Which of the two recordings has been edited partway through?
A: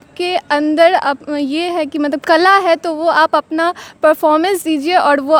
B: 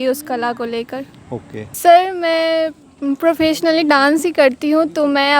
B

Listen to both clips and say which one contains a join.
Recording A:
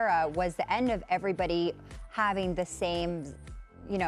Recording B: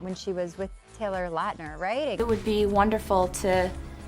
B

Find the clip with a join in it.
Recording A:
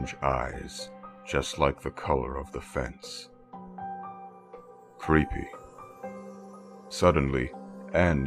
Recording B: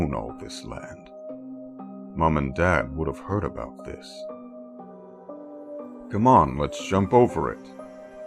B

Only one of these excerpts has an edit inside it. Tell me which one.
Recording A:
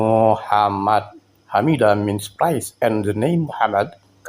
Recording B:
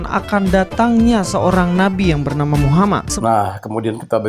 B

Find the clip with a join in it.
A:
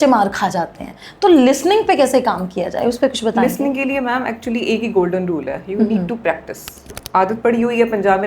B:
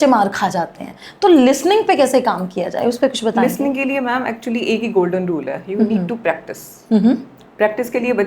A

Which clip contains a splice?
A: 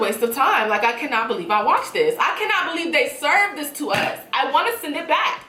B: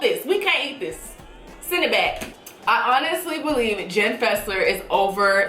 B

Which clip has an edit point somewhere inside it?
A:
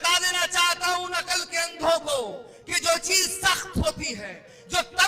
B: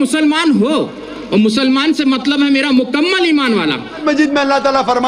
B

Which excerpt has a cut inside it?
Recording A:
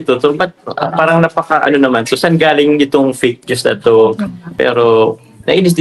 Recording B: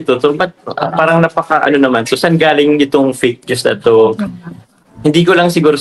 A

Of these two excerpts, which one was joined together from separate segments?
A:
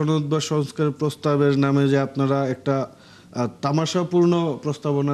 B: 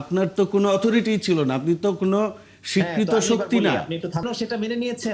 B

